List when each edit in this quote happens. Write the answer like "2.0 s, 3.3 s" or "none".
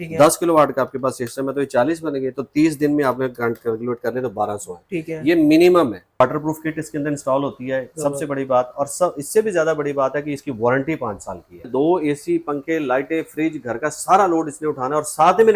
6.2 s, 11.7 s